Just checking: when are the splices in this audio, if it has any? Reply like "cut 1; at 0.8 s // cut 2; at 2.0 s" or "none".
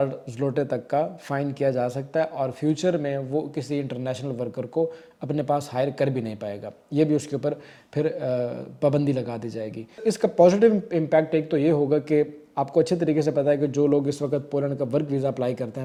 none